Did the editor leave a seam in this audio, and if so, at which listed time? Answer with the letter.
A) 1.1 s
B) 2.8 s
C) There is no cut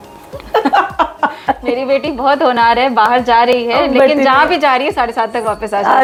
C